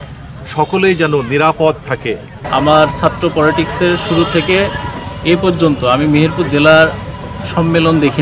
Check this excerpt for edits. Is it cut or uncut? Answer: cut